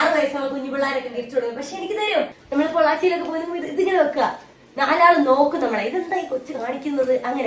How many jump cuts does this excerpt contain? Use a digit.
1